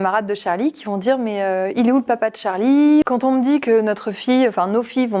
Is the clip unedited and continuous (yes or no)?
no